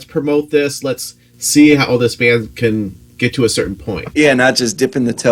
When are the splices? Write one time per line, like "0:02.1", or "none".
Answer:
0:04.0